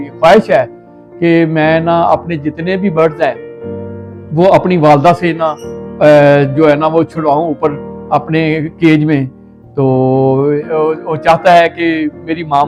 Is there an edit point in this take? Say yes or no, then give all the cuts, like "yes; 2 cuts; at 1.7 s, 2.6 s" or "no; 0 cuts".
no; 0 cuts